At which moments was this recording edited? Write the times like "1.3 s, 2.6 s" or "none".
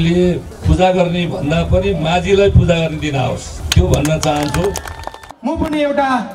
5.3 s

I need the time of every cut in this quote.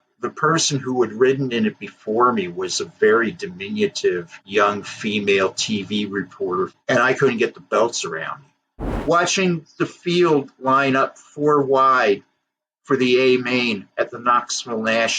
6.8 s, 8.9 s

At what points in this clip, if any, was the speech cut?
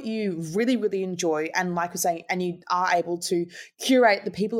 none

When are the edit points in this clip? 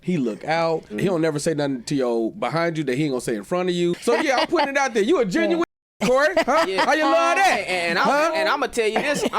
0.9 s, 4.0 s

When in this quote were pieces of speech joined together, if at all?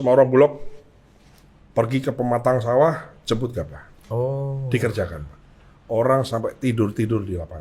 none

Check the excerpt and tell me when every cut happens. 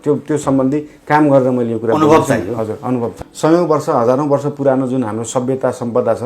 3.2 s

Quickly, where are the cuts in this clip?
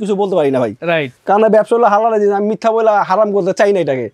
none

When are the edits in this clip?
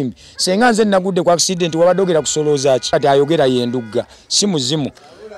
2.9 s

